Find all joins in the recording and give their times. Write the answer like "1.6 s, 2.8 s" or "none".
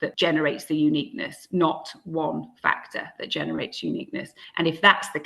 none